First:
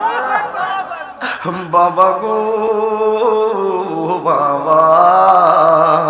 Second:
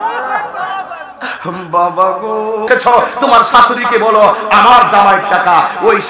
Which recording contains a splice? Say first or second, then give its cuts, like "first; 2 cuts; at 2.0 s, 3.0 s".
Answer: second; 1 cut; at 2.7 s